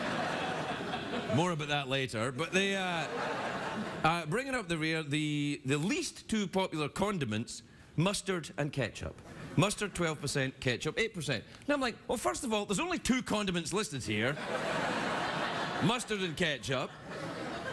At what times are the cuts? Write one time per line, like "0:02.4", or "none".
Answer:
none